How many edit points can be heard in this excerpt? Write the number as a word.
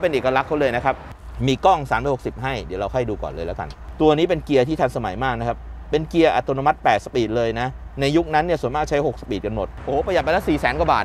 three